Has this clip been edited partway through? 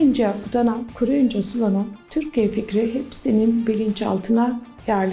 no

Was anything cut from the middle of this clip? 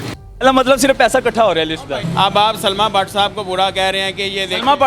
yes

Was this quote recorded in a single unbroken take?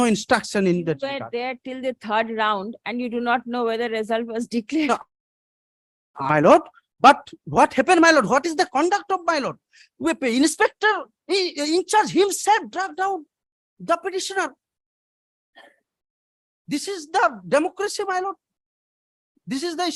yes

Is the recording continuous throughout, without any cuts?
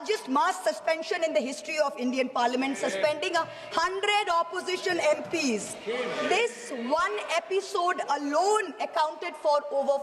yes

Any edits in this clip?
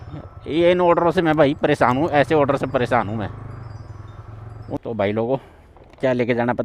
yes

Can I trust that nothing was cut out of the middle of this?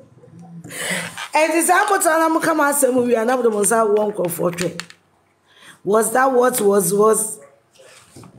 yes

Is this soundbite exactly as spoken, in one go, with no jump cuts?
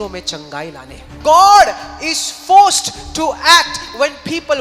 no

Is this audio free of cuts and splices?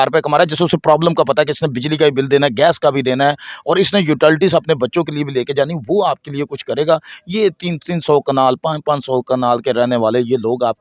yes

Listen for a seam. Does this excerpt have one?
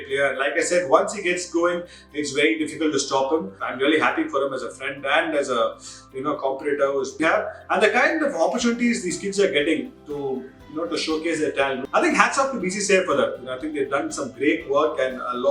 yes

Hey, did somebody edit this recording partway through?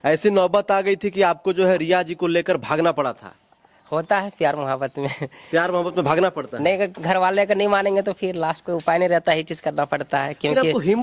no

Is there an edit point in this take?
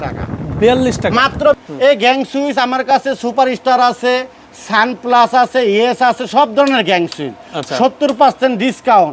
yes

